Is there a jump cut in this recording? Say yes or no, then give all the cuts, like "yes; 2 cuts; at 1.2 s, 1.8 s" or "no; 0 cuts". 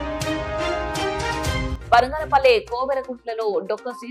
no; 0 cuts